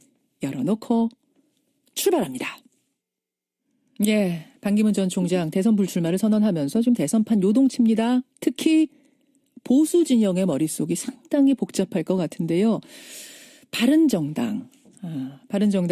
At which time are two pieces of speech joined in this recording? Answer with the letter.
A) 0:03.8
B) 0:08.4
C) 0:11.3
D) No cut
A